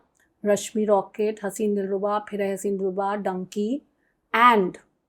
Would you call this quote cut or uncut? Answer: uncut